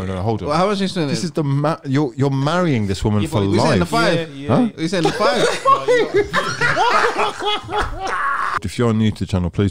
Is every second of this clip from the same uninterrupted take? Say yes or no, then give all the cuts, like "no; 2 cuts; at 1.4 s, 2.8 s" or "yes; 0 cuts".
no; 1 cut; at 8.6 s